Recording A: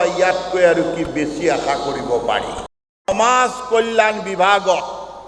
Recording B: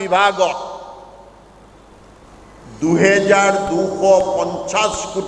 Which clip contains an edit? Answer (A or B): A